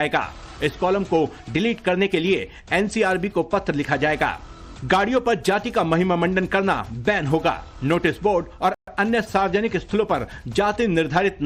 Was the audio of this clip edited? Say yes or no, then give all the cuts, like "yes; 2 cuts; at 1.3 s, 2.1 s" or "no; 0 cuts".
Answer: no; 0 cuts